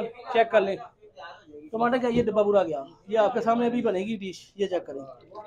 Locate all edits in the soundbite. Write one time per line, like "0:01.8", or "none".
none